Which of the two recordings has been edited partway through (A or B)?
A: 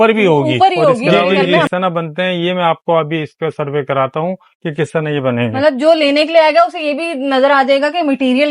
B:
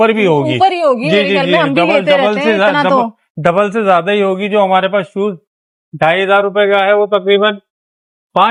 A